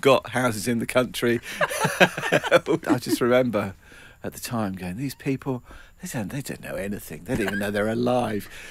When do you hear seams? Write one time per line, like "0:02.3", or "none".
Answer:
0:02.8